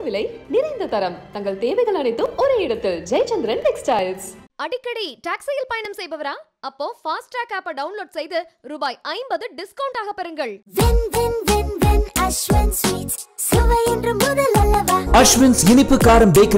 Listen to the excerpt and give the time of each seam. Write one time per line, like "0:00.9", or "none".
none